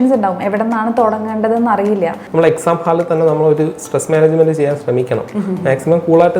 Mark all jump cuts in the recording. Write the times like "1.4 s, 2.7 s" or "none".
2.2 s